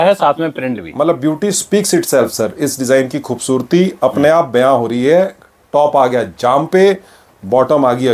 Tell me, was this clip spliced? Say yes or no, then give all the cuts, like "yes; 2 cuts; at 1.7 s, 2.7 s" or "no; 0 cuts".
no; 0 cuts